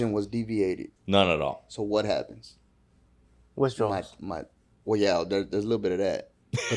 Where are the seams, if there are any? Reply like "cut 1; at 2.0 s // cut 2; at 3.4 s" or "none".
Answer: cut 1; at 0.9 s